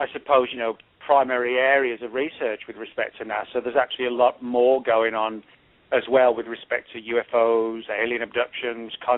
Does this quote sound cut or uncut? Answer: cut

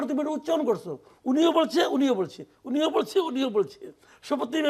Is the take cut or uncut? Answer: uncut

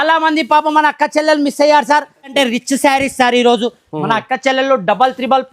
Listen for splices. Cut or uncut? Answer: cut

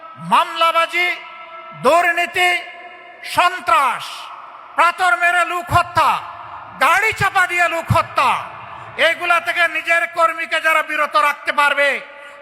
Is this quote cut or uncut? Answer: uncut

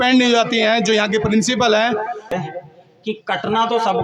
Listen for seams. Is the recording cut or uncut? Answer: cut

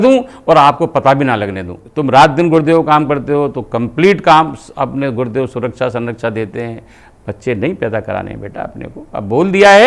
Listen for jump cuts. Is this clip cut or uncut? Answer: cut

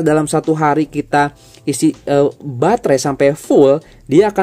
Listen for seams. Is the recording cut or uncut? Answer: uncut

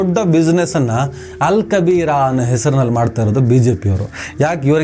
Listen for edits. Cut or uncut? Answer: uncut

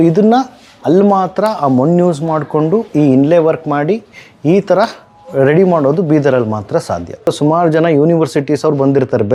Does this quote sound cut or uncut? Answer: uncut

